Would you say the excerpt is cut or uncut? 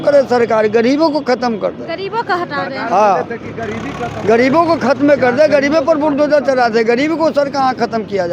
uncut